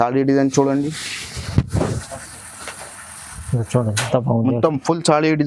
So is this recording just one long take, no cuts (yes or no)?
yes